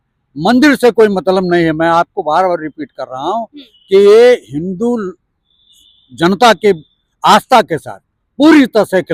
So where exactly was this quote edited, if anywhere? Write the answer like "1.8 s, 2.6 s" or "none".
none